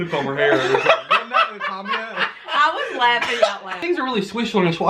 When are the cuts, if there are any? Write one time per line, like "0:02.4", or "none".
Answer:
0:03.8